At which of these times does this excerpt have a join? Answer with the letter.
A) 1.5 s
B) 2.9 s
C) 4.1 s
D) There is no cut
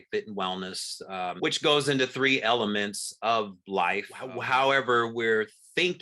C